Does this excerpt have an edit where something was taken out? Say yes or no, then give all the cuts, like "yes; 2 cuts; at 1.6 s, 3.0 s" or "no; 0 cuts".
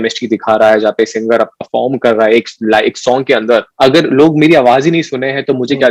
yes; 1 cut; at 3.7 s